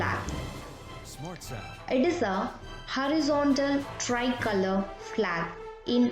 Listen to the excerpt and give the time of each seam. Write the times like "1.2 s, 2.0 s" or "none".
none